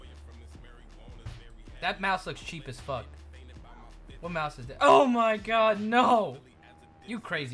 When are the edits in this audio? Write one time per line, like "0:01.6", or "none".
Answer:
none